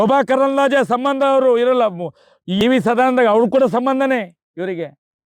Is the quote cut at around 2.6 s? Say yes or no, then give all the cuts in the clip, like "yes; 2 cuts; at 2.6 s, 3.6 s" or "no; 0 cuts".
yes; 1 cut; at 2.6 s